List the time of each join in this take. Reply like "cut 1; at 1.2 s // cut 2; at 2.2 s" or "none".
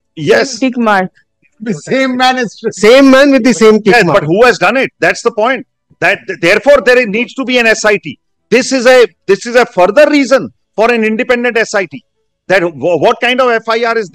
none